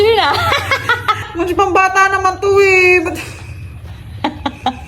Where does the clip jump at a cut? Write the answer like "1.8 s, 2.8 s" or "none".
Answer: 1.3 s

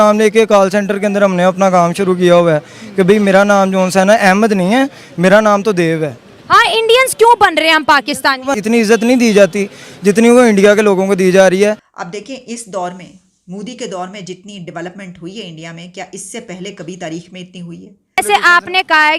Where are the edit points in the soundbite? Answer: 8.6 s, 11.9 s, 18.2 s

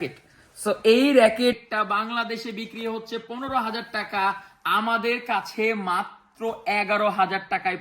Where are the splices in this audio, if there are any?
1.6 s

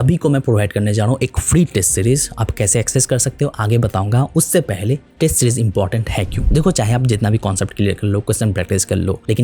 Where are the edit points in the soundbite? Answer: none

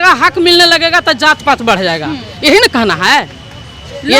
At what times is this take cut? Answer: none

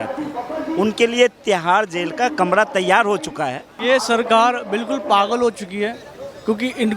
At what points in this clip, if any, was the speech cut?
3.7 s

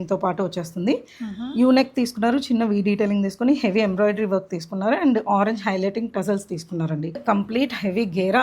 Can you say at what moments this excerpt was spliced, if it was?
7.2 s

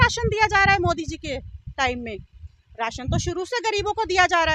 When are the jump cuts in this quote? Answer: none

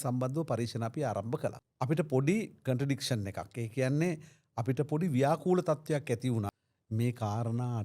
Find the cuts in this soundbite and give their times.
1.6 s, 6.5 s

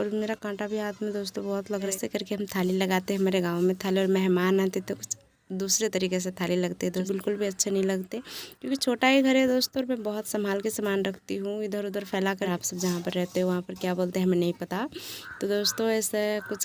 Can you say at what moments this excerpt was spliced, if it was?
1.9 s, 7.1 s, 12.5 s

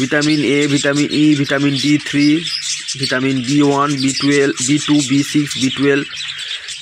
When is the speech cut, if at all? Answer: none

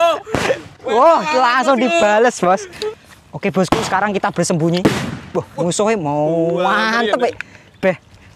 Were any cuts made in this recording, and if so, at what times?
2.8 s

